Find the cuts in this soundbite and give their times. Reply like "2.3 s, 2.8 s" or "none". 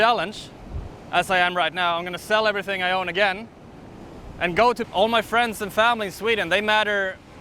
4.9 s